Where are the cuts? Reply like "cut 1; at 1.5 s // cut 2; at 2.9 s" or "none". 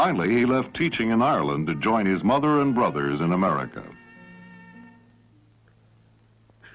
none